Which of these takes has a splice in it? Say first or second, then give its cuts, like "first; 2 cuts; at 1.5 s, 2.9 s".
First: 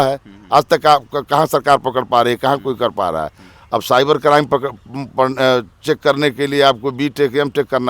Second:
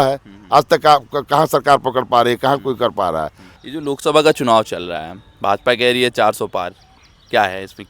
second; 1 cut; at 3.6 s